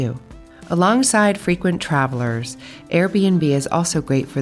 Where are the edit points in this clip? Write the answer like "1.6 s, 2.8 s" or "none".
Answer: none